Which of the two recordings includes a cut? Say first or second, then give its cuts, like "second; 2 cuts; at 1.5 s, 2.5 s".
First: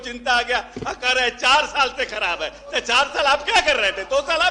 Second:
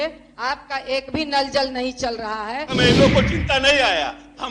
second; 1 cut; at 2.7 s